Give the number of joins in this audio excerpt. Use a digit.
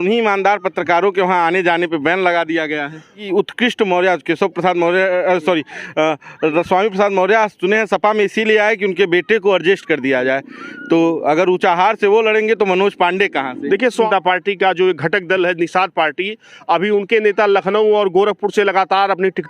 2